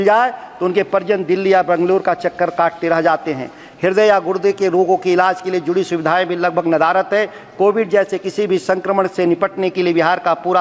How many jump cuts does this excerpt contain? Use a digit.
0